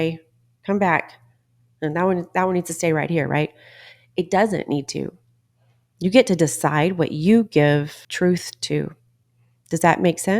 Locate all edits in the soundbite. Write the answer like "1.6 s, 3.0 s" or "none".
8.0 s

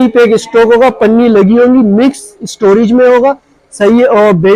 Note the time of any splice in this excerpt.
none

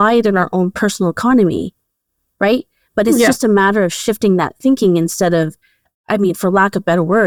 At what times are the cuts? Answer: none

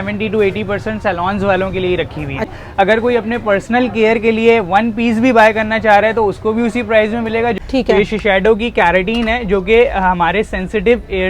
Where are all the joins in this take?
2.5 s, 7.6 s

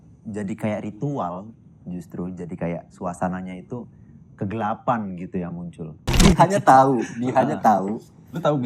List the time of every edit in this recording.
6.2 s

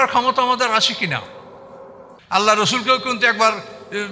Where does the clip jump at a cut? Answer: 2.1 s

